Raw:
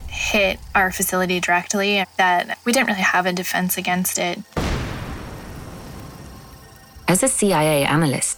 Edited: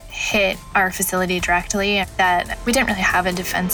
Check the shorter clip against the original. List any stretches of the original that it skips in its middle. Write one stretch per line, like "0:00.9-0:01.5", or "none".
none